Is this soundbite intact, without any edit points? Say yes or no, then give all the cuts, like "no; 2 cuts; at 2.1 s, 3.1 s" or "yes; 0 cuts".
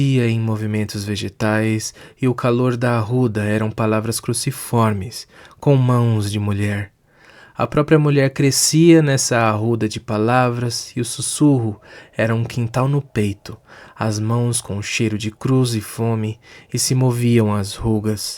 yes; 0 cuts